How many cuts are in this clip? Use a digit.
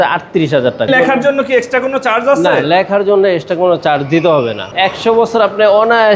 2